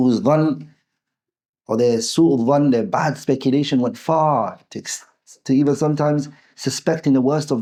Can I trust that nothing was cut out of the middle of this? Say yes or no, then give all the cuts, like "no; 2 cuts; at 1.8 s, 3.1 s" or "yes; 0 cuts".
yes; 0 cuts